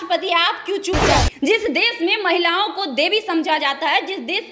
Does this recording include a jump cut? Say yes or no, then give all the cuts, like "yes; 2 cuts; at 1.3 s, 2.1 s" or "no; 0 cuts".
yes; 1 cut; at 1.0 s